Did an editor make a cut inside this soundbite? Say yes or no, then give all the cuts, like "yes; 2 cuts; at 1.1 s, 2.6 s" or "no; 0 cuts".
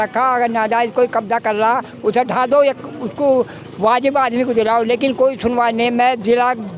no; 0 cuts